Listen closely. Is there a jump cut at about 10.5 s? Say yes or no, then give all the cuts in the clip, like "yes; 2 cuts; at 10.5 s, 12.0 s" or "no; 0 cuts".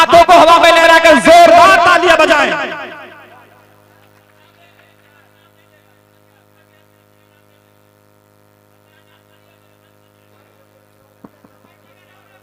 yes; 1 cut; at 10.5 s